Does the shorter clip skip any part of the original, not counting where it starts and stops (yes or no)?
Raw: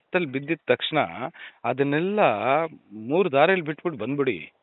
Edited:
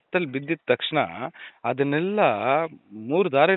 no